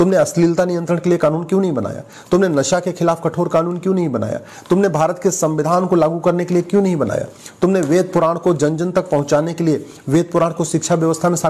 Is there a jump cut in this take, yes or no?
no